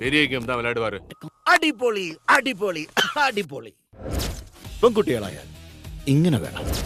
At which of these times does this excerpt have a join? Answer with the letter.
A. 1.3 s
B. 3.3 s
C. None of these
A